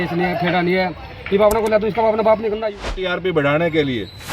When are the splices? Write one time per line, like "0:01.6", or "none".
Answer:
0:03.1